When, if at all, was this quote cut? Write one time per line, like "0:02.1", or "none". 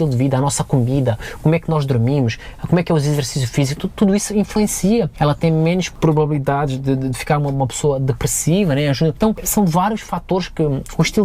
0:05.1
0:05.9
0:09.3